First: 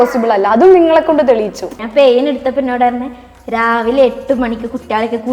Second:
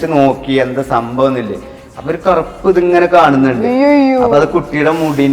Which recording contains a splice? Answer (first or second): first